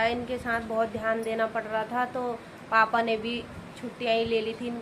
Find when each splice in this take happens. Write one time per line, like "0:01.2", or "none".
none